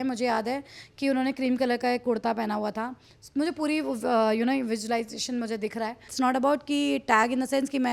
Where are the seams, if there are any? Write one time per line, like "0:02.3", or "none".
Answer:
0:06.1

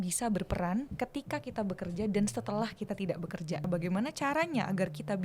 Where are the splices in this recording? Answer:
0:00.9
0:03.6

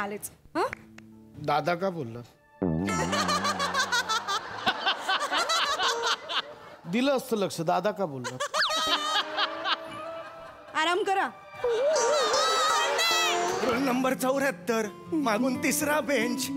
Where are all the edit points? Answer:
0:13.6

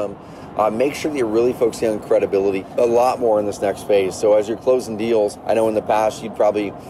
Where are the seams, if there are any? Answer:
0:02.6
0:05.4

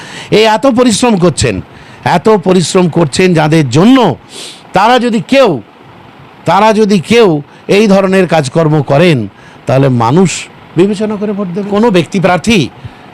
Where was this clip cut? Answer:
0:11.7

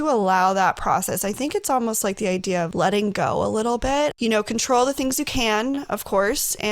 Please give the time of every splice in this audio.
0:02.7
0:04.1

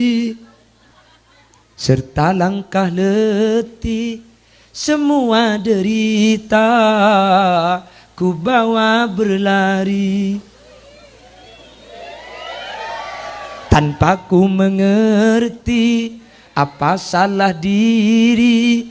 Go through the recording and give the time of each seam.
none

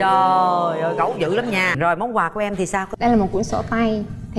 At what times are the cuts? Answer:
0:01.8

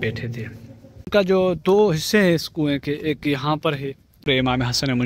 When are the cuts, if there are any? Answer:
0:01.1
0:04.3

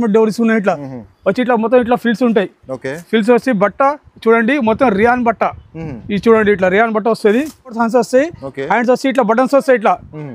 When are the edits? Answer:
0:07.8

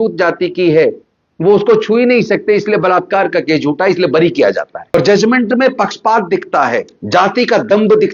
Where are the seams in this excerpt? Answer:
0:04.9
0:06.9

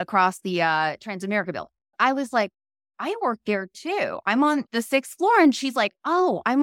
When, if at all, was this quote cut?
0:01.9
0:04.7

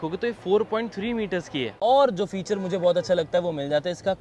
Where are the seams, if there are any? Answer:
0:01.7

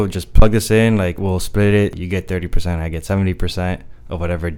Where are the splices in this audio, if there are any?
0:01.2
0:02.0

